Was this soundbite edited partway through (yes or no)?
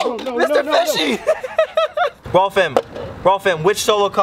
no